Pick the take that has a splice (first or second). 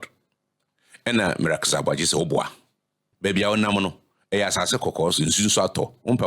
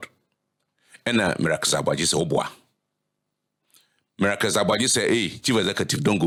first